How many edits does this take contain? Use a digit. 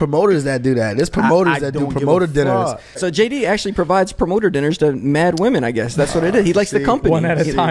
1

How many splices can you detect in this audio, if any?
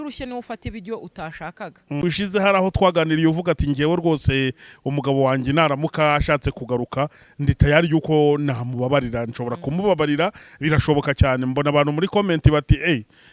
1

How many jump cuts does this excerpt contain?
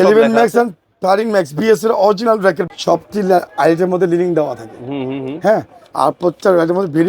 1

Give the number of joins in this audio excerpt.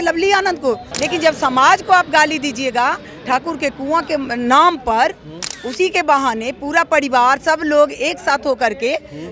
1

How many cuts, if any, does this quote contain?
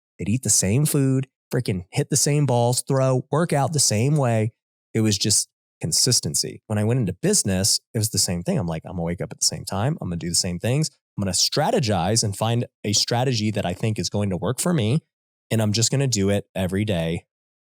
2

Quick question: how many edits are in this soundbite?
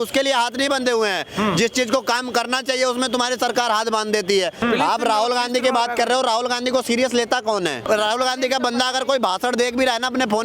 2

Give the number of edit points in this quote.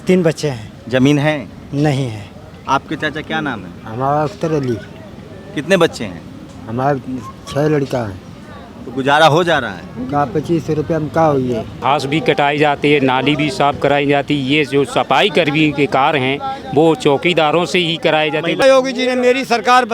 2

